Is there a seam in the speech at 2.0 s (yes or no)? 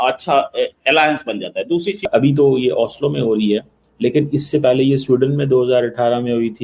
yes